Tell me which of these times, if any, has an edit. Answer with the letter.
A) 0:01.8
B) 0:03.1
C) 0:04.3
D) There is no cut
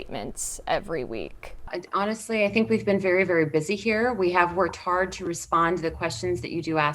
A